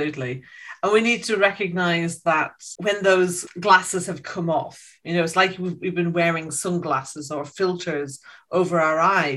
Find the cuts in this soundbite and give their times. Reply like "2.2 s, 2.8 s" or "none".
2.6 s, 3.5 s